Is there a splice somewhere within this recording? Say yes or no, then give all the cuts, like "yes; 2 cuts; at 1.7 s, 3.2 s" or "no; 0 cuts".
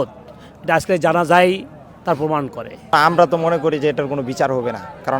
yes; 1 cut; at 2.9 s